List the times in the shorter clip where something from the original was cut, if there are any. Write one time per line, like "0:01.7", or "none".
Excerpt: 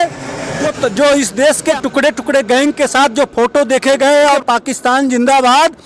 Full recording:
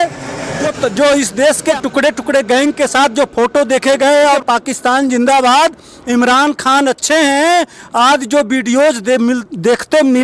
none